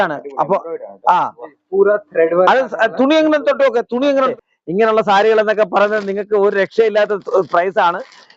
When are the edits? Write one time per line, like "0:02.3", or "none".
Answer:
0:04.3